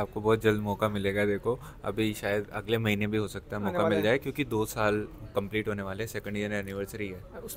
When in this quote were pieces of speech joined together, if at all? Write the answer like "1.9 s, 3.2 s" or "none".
none